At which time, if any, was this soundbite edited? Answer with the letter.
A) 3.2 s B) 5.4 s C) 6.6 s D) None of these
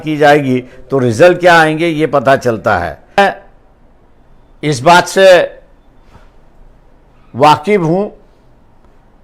A